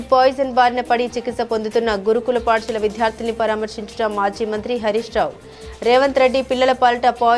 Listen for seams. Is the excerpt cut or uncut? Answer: uncut